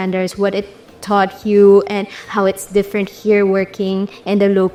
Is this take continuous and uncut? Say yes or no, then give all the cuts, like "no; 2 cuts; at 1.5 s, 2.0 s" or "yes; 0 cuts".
yes; 0 cuts